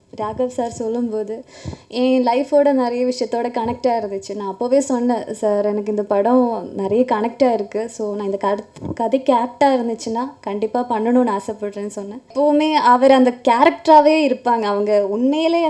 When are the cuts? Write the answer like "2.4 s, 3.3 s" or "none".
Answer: 12.3 s